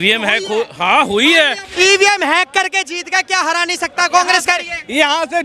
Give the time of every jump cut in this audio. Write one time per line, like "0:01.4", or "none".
0:01.6